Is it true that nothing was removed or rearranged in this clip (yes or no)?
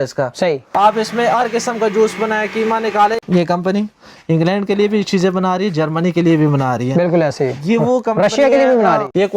yes